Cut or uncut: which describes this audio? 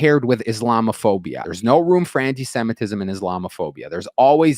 cut